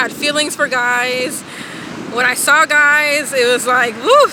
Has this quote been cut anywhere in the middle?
no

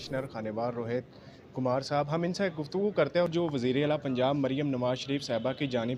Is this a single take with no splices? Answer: no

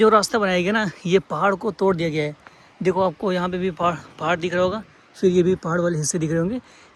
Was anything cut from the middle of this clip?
no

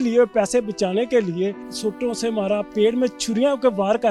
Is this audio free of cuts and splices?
no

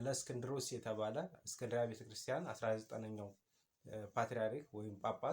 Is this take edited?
yes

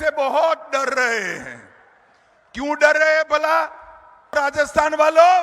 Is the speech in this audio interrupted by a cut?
yes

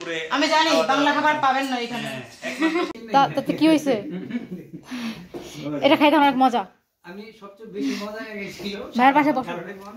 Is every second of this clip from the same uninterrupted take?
no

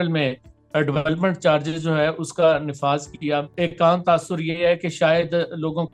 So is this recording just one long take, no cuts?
no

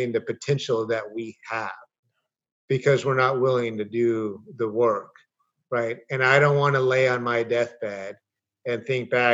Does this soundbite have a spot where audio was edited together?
no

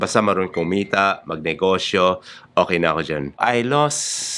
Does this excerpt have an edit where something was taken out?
yes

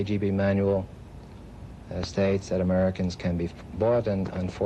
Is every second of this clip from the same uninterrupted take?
yes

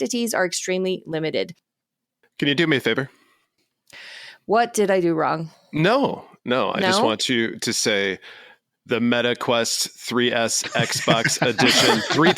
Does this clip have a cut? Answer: yes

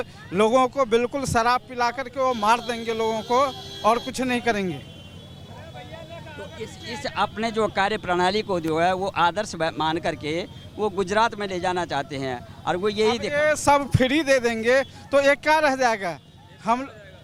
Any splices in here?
no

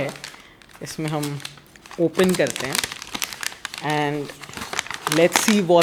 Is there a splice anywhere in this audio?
no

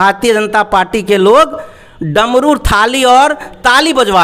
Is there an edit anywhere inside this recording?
no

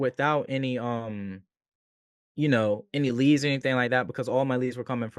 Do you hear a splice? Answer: no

